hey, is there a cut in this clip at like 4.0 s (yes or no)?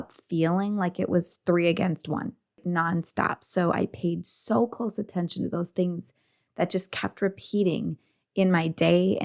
no